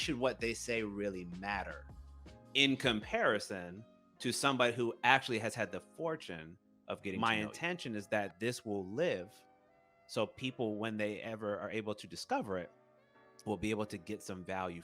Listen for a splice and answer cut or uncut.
cut